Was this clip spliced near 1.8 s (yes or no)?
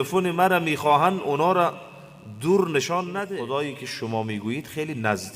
no